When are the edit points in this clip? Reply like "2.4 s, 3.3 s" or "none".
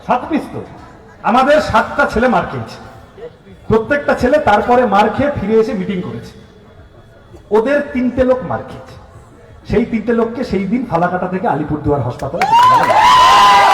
none